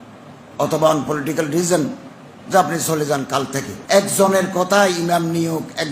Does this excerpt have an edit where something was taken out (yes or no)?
yes